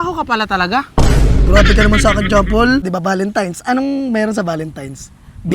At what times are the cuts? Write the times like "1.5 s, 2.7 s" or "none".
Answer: 2.9 s

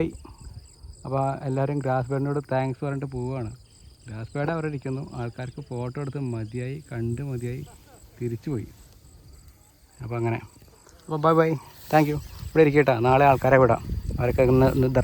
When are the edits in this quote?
none

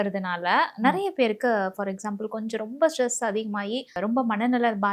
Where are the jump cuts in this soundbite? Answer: 4.0 s

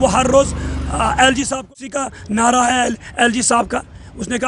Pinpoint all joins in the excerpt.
1.6 s

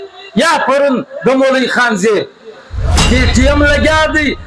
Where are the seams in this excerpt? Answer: 2.9 s

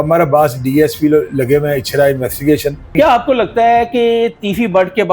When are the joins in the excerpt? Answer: 2.9 s

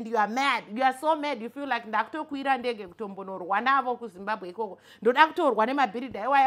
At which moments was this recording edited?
none

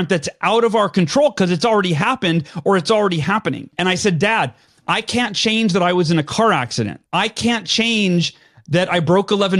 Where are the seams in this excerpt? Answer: 3.7 s, 7.0 s

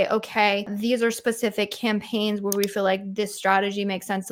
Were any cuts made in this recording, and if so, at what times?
none

